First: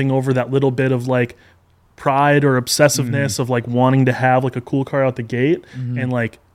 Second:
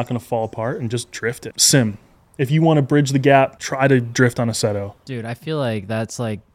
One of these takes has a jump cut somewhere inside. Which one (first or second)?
second